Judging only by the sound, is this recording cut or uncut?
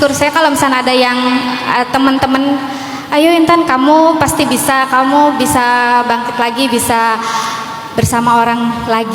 uncut